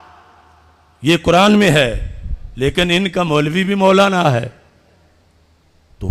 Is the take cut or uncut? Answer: uncut